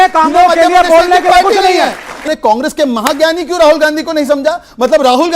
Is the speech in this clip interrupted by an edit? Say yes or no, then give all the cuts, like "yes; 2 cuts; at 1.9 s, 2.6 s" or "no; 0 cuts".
yes; 1 cut; at 2.2 s